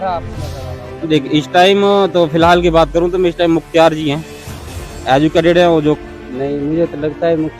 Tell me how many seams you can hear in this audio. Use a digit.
1